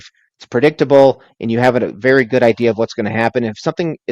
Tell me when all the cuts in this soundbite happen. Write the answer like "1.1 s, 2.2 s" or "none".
none